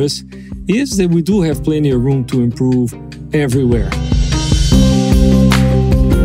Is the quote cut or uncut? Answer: cut